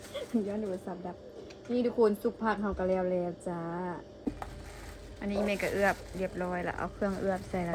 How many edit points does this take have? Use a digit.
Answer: 1